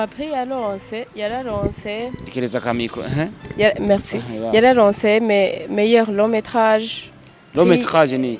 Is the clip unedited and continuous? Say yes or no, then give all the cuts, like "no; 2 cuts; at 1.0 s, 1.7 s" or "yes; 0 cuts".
yes; 0 cuts